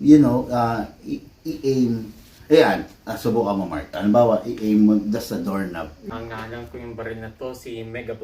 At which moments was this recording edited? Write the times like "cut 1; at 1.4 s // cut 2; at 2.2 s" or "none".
cut 1; at 6.1 s

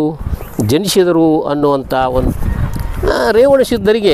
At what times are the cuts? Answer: cut 1; at 2.2 s

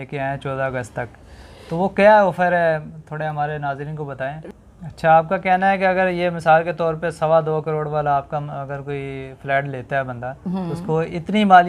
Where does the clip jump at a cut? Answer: cut 1; at 4.4 s

